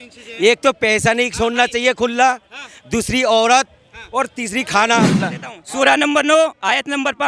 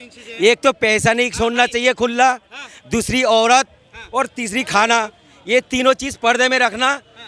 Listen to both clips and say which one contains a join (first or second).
first